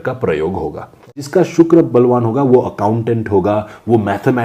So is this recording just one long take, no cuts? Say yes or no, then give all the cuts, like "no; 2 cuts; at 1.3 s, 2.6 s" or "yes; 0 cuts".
no; 1 cut; at 1.3 s